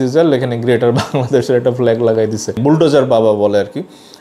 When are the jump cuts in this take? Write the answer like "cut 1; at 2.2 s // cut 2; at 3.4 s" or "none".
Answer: cut 1; at 2.6 s